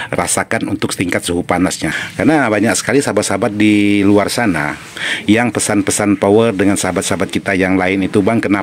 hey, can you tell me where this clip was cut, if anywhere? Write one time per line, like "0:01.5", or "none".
0:01.9